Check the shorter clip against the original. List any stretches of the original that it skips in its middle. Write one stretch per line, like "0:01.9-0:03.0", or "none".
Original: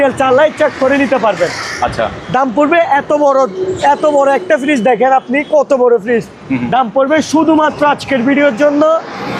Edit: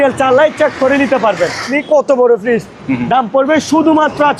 0:01.7-0:05.3